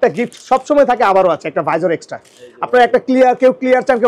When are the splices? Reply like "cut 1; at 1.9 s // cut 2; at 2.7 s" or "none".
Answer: none